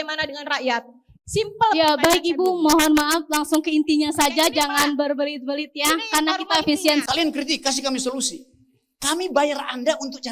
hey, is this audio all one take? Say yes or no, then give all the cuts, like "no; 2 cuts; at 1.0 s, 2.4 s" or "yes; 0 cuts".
no; 1 cut; at 7.0 s